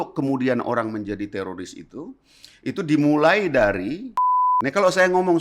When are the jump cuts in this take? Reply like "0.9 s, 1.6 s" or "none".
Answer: 4.3 s